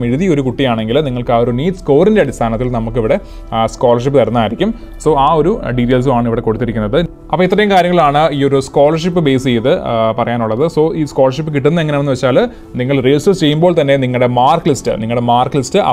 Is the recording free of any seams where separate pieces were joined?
yes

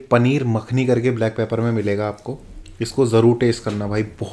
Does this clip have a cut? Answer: no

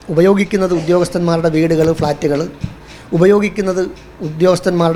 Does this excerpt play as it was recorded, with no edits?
yes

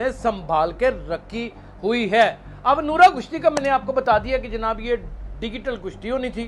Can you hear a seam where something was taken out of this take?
no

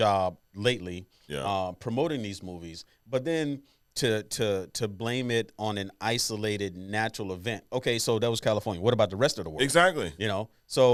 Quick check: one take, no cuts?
yes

